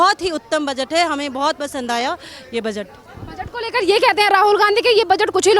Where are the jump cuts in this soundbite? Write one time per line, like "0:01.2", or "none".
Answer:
none